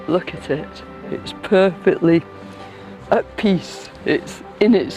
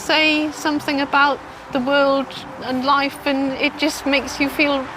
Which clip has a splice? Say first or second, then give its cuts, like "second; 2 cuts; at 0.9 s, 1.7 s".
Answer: second; 1 cut; at 1.5 s